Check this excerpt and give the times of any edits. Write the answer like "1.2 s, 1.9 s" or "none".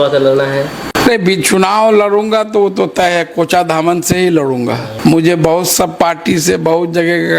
0.9 s, 4.9 s